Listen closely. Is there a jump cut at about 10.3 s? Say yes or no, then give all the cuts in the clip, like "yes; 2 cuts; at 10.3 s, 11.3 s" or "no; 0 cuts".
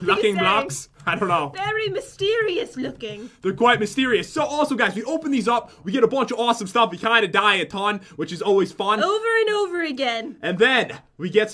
yes; 1 cut; at 10.3 s